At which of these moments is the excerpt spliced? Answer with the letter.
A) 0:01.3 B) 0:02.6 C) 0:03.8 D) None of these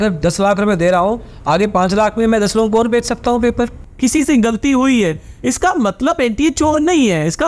C